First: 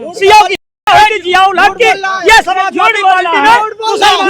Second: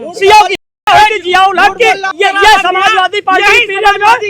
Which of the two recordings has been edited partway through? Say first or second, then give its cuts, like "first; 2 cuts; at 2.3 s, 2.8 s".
second; 1 cut; at 2.1 s